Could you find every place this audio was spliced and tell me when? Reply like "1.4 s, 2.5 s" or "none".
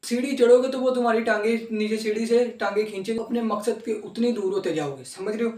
3.2 s